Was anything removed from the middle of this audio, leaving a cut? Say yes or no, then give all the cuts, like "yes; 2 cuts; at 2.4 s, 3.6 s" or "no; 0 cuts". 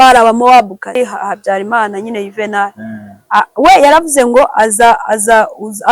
yes; 1 cut; at 1.0 s